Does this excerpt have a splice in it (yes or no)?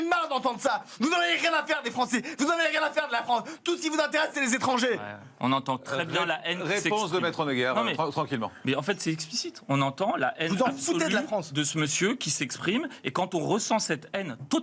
no